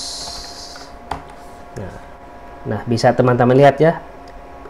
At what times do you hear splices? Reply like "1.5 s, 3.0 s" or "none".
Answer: 2.0 s